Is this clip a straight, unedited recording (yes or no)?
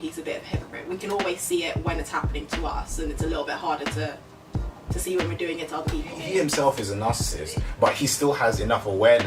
no